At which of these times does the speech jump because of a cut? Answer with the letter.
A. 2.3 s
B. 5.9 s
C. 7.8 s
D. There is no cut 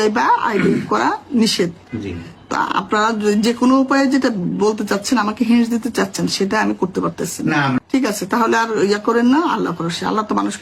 C